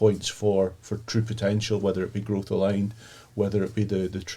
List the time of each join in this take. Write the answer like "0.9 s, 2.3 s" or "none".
none